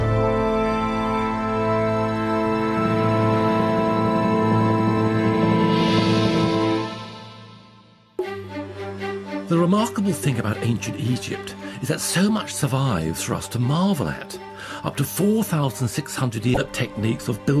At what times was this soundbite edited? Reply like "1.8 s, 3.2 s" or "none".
none